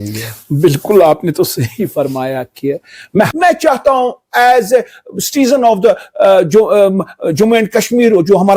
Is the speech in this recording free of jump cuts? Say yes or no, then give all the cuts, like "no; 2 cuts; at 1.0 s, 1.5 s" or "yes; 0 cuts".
no; 1 cut; at 3.7 s